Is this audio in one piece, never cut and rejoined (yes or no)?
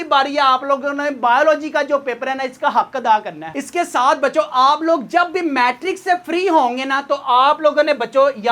yes